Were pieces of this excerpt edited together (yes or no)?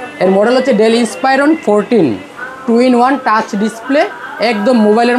no